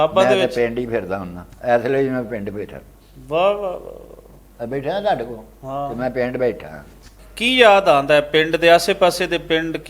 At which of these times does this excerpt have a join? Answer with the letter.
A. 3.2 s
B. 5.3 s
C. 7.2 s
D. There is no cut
C